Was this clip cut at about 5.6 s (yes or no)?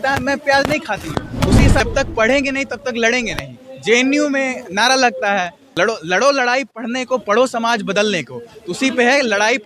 yes